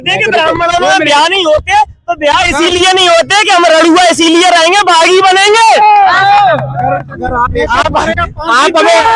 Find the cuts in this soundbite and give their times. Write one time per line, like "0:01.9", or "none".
none